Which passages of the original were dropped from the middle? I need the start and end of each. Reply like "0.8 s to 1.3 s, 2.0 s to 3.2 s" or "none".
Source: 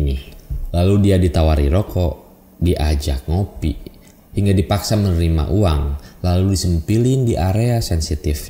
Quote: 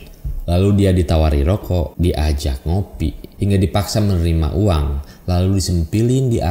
2.2 s to 2.5 s, 3.9 s to 4.2 s